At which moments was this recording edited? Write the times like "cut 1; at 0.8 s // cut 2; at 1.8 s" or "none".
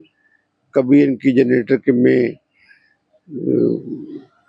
none